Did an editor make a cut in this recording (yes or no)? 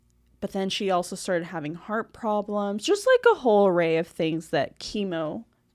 no